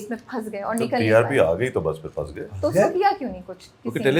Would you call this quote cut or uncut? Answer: uncut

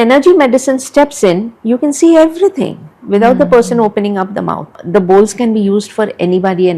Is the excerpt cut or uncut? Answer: cut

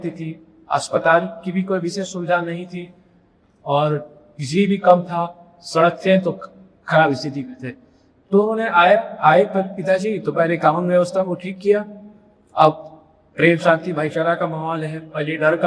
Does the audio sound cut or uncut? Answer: uncut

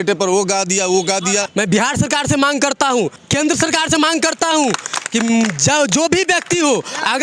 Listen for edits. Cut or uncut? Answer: cut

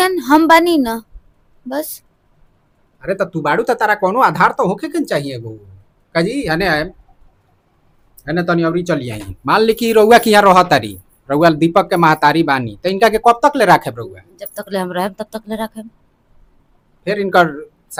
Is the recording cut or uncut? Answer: uncut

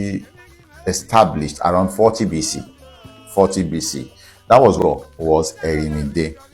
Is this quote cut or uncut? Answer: cut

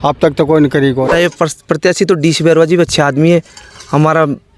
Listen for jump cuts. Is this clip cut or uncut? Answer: cut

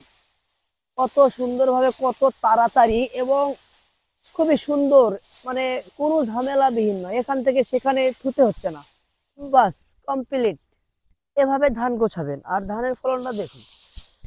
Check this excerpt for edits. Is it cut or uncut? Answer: uncut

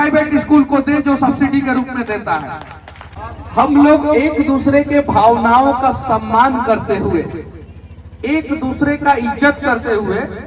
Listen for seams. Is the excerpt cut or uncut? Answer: cut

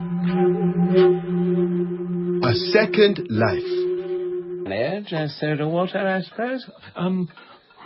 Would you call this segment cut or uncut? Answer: uncut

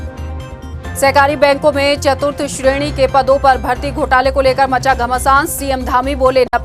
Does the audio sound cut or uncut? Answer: cut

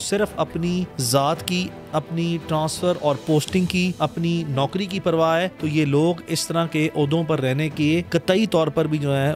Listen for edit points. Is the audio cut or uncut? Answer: cut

